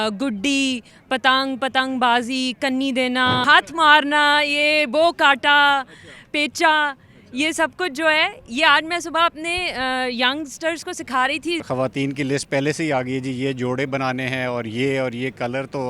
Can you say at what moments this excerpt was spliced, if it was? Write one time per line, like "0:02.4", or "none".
0:03.4
0:11.6